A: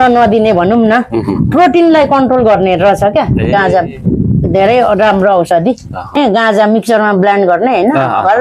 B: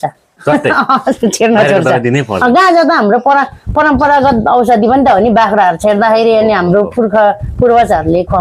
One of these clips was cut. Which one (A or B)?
A